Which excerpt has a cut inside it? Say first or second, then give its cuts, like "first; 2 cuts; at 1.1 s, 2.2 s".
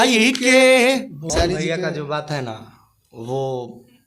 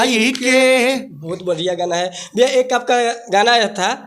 first; 1 cut; at 1.3 s